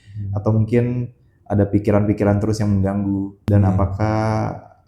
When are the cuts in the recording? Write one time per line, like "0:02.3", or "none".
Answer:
0:03.4